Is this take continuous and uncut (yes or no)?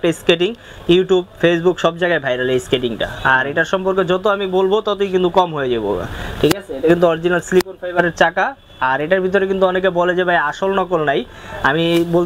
yes